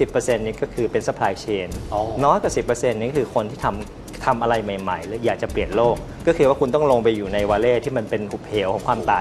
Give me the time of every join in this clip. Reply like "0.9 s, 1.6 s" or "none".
6.1 s